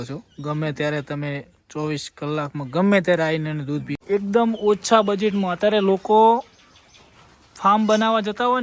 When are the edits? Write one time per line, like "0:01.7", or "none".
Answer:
0:03.9